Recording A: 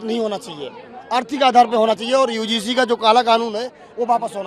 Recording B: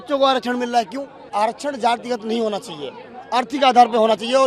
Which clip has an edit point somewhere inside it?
B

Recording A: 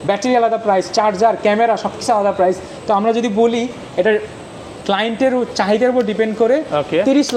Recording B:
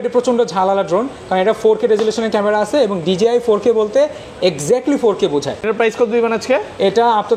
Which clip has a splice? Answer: B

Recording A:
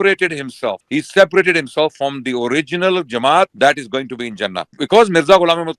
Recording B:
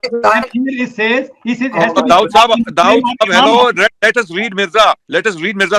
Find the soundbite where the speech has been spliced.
A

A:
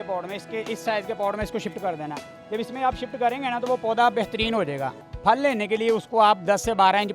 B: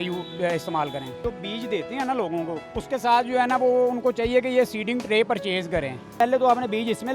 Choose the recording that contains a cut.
B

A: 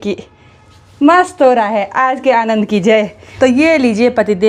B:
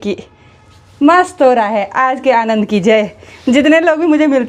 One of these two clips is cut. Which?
A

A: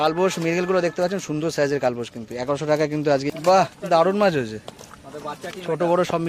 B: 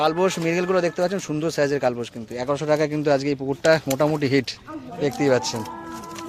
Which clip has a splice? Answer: A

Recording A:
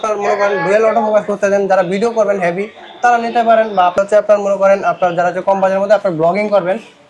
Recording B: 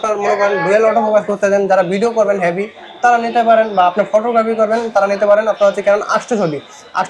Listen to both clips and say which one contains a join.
A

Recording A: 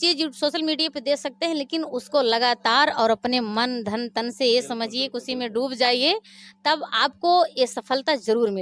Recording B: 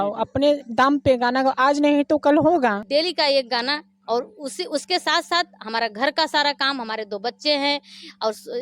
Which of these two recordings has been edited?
B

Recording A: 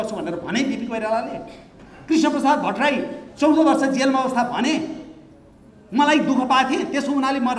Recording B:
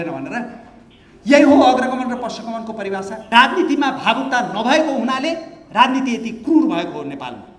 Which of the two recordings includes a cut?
B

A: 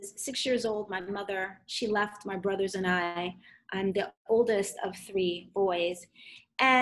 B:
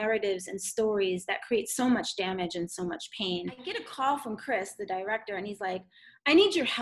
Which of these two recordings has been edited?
B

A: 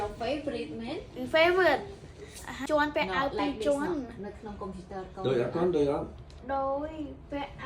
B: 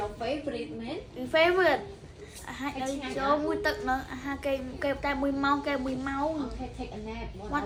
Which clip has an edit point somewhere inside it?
A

